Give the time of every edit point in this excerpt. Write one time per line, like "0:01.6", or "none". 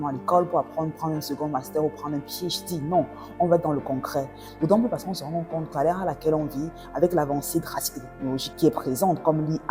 none

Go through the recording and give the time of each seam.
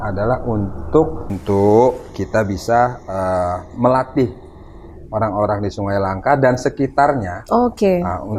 0:01.2

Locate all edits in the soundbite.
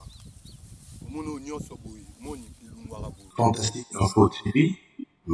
0:03.3

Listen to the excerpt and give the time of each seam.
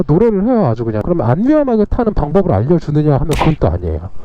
0:01.0

